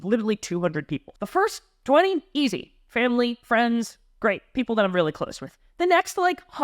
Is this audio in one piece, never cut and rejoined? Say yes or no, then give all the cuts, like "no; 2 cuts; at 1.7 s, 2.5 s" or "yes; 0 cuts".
no; 1 cut; at 1.0 s